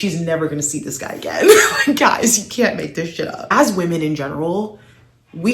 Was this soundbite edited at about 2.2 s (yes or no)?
no